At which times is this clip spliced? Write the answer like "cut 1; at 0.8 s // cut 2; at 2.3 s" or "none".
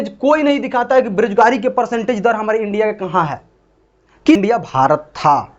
cut 1; at 4.4 s

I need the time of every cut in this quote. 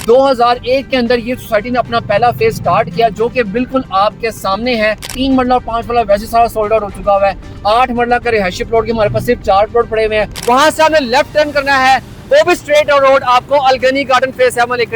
cut 1; at 5.1 s // cut 2; at 10.3 s

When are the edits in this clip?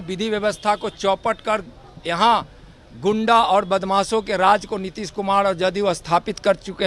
none

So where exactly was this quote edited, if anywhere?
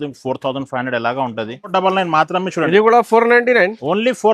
cut 1; at 1.7 s

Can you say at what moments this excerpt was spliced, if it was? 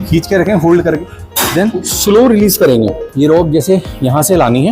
cut 1; at 3.0 s

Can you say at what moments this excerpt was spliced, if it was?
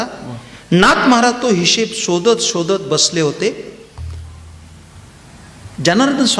none

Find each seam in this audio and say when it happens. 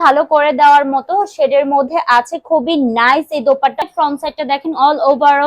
cut 1; at 3.9 s

